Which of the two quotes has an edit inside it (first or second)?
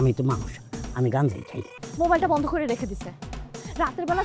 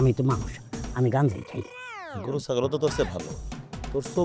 first